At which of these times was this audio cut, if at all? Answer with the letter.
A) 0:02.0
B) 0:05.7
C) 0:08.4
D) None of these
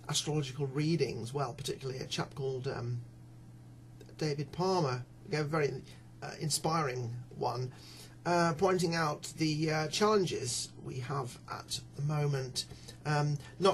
A